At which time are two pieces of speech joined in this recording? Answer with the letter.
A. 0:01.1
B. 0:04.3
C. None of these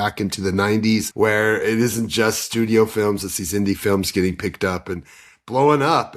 A